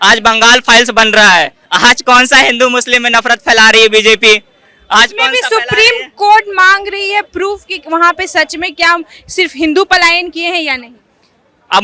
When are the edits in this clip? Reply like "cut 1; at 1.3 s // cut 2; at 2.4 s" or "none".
none